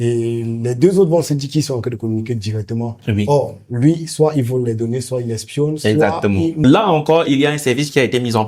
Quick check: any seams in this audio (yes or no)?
yes